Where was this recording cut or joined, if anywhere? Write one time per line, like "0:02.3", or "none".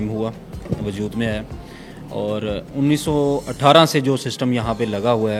none